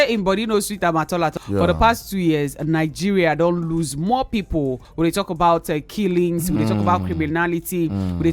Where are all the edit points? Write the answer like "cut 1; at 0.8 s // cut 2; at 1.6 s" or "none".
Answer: cut 1; at 1.4 s // cut 2; at 4.8 s